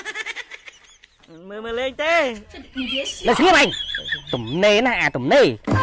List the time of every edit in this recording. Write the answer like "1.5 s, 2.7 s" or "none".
2.5 s